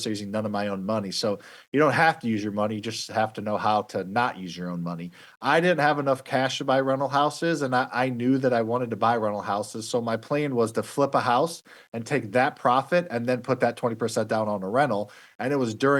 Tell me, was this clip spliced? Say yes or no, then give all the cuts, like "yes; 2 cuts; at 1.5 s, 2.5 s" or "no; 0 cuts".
yes; 1 cut; at 5.2 s